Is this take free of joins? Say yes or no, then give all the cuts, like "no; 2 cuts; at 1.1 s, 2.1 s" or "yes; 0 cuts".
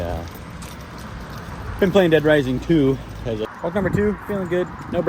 no; 1 cut; at 3.5 s